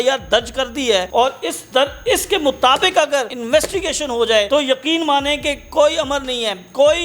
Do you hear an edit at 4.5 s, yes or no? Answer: yes